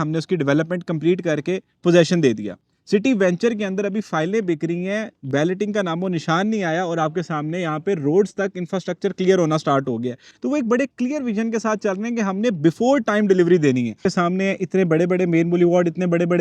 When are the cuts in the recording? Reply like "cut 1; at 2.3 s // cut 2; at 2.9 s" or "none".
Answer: cut 1; at 14.1 s